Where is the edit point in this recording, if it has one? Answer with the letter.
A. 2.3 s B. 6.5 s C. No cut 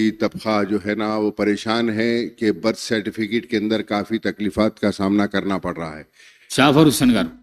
B